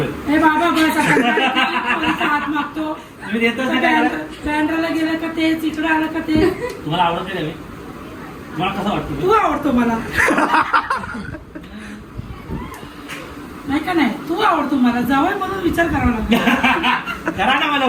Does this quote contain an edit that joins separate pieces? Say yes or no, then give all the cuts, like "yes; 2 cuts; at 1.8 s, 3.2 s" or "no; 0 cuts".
no; 0 cuts